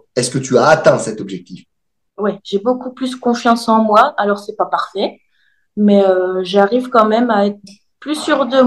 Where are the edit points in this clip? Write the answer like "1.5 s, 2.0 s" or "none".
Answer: none